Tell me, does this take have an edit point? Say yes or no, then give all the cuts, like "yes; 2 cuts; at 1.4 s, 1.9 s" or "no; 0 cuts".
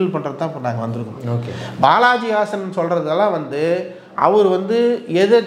no; 0 cuts